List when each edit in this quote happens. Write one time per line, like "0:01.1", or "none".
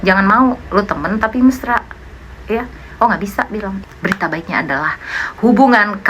0:03.8